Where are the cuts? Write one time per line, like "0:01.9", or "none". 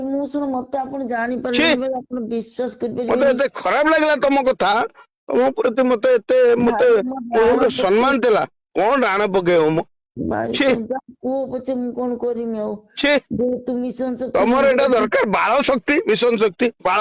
none